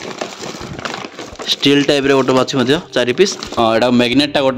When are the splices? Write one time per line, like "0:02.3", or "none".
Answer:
0:03.6